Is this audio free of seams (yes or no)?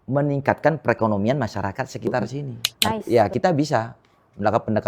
no